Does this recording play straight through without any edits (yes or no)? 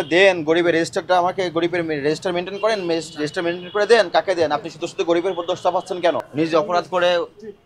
no